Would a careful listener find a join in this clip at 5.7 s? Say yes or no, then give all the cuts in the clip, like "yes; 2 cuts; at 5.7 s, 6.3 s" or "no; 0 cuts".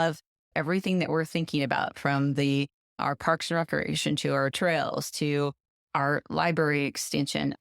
yes; 1 cut; at 5.7 s